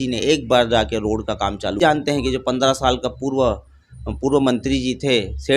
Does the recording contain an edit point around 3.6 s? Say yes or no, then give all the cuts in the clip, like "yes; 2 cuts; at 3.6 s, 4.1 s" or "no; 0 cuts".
no; 1 cut; at 1.8 s